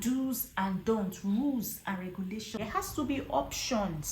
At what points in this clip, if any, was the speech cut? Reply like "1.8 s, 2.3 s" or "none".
2.6 s

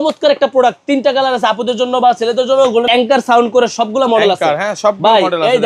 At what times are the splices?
2.9 s

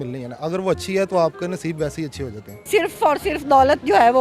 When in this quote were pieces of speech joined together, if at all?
2.7 s

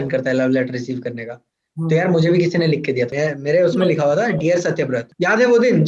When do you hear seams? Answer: 3.1 s

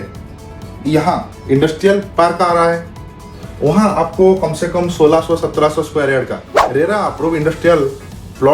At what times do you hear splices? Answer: 1.3 s, 2.1 s

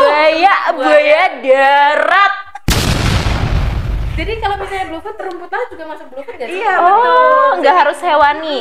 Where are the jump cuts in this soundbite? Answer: none

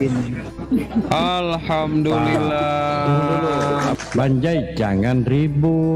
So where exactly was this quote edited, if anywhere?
3.9 s

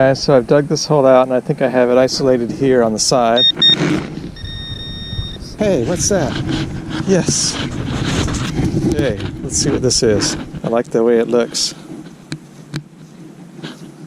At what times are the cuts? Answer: 3.5 s, 5.5 s, 10.5 s

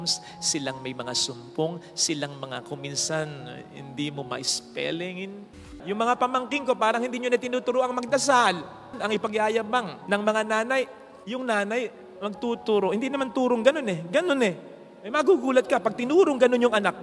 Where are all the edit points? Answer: 5.6 s, 8.9 s, 11.1 s

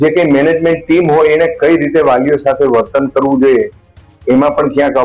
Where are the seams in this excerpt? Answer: none

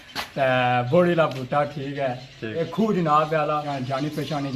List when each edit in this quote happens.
2.6 s, 3.7 s

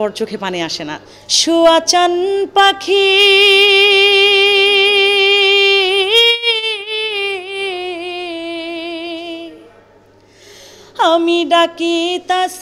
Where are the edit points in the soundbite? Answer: 1.0 s

